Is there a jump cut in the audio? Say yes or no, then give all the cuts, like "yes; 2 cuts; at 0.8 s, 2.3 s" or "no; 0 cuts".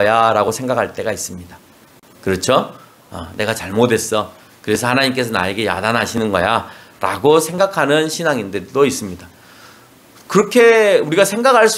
no; 0 cuts